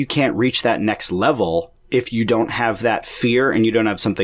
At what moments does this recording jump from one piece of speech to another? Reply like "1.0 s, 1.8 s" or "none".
none